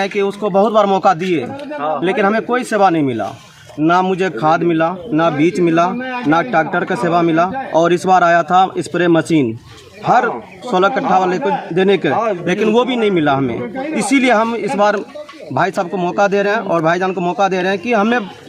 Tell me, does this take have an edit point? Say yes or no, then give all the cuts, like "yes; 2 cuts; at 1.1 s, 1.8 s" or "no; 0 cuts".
no; 0 cuts